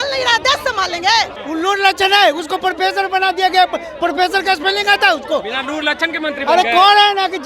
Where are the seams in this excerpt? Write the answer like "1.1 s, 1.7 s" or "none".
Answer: 1.4 s